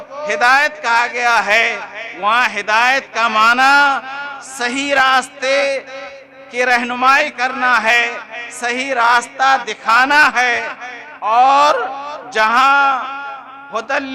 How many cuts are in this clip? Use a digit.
0